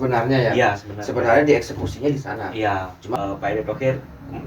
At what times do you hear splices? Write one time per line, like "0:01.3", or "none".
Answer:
0:03.1